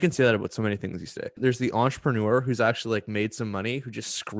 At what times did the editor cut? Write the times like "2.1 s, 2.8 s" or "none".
1.3 s